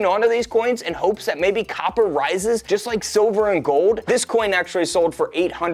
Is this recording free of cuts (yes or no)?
no